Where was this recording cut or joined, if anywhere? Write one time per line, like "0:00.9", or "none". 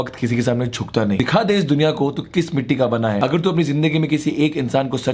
0:01.2
0:03.2